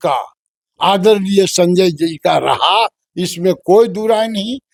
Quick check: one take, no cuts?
yes; 0 cuts

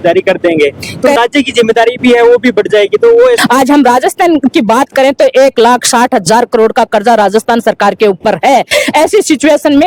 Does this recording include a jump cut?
yes; 2 cuts; at 1.2 s, 3.4 s

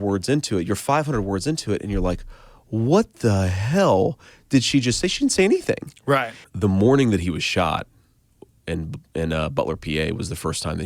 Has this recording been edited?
yes; 1 cut; at 6.4 s

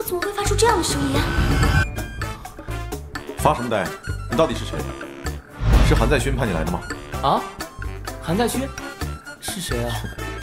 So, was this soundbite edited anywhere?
yes; 1 cut; at 1.8 s

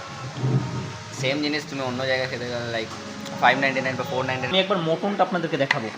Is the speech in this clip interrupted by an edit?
yes; 1 cut; at 4.5 s

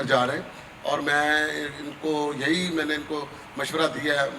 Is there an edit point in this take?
no; 0 cuts

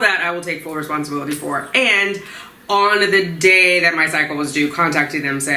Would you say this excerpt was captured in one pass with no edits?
yes; 0 cuts

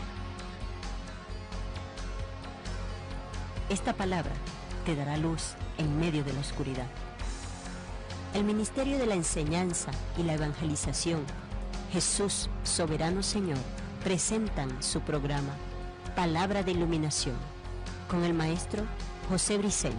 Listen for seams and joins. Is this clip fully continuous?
yes; 0 cuts

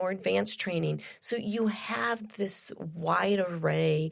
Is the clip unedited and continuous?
yes; 0 cuts

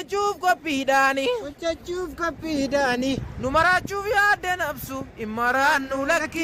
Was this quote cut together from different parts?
no; 0 cuts

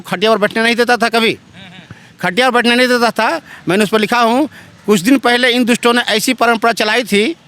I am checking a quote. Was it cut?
no; 0 cuts

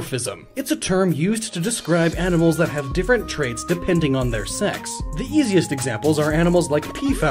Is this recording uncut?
no; 1 cut; at 5.8 s

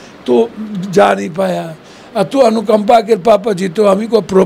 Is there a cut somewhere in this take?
no; 0 cuts

